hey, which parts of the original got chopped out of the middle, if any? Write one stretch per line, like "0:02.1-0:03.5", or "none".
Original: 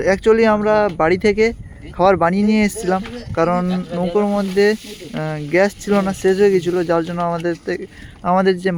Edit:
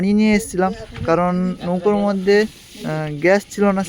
none